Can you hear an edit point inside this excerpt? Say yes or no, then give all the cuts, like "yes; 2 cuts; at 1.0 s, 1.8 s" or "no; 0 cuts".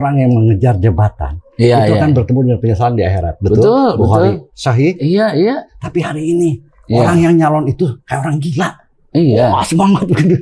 no; 0 cuts